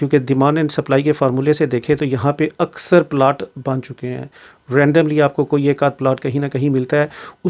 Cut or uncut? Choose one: uncut